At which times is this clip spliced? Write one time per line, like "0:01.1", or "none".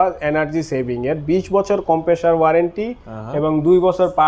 none